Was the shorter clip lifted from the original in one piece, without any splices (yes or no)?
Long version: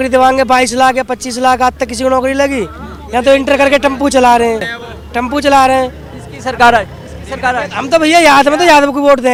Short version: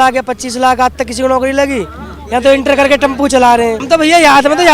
no